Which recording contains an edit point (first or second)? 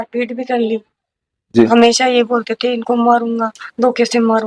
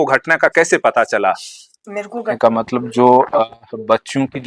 second